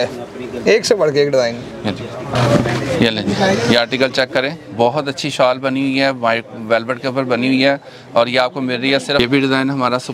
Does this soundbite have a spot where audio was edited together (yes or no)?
yes